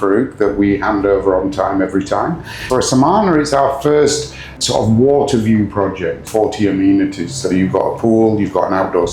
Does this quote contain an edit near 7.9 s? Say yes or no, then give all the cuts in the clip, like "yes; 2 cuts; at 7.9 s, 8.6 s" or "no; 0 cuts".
no; 3 cuts; at 2.5 s, 4.6 s, 6.2 s